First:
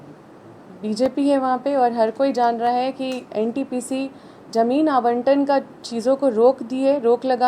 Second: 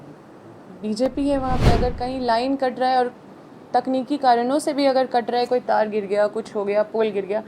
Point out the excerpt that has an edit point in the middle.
second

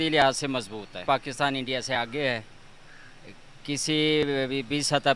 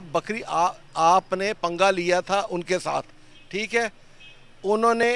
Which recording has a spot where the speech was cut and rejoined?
first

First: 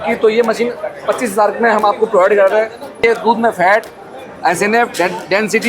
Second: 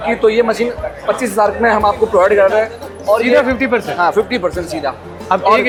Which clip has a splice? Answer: first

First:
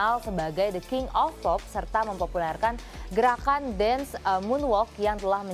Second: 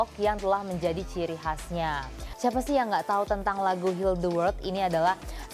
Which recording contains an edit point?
second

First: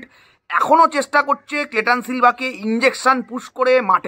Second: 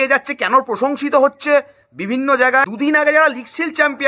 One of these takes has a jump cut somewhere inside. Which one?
second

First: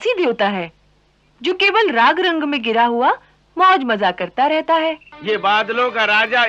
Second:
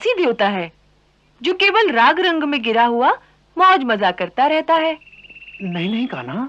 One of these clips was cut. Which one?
first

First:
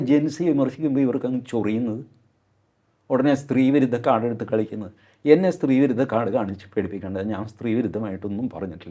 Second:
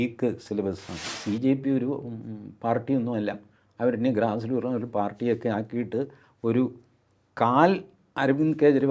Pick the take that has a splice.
second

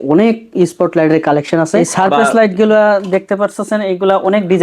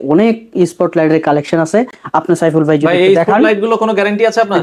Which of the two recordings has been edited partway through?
first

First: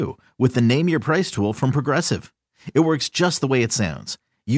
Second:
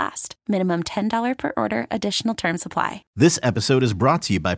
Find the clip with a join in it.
second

